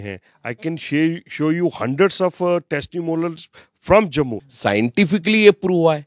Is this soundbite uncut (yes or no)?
no